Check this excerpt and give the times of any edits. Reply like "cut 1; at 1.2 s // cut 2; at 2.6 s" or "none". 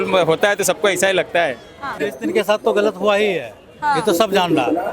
cut 1; at 2.0 s